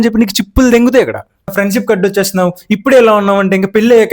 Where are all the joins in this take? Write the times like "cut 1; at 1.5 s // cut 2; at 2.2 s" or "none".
cut 1; at 1.5 s